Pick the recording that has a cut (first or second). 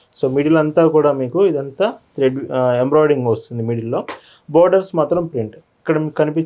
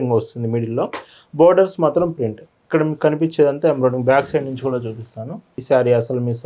second